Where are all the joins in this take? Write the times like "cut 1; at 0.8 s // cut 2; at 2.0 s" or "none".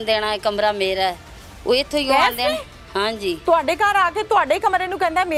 none

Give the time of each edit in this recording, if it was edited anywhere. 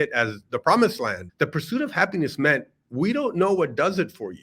cut 1; at 1.2 s

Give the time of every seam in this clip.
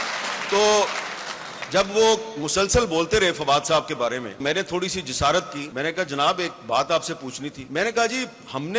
cut 1; at 4.4 s // cut 2; at 5.6 s // cut 3; at 7.6 s

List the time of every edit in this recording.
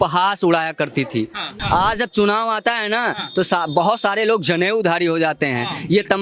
cut 1; at 1.5 s

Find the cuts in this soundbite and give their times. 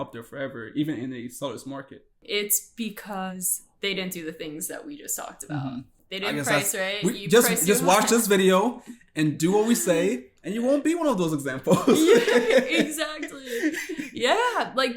cut 1; at 2.2 s // cut 2; at 3.3 s // cut 3; at 6.0 s

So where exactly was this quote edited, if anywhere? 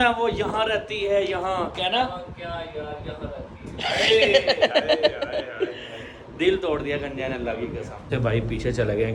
cut 1; at 8.1 s

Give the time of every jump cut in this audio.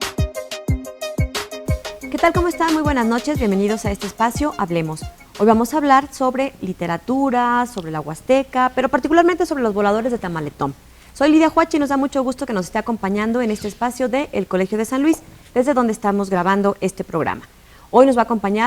cut 1; at 2.0 s

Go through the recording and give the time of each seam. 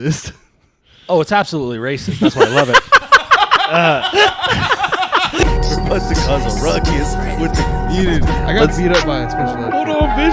cut 1; at 5.4 s

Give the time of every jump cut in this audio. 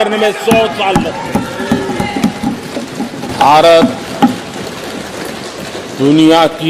cut 1; at 3.3 s

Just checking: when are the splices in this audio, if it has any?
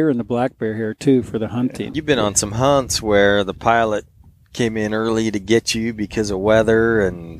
cut 1; at 1.9 s

